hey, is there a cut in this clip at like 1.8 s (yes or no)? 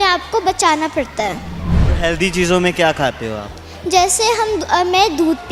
yes